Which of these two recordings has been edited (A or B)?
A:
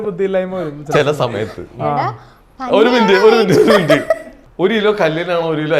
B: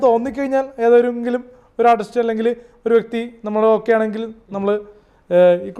A